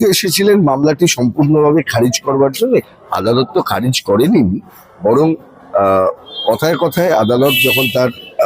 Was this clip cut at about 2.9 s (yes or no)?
yes